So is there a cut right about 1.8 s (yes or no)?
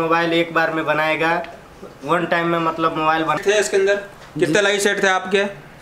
no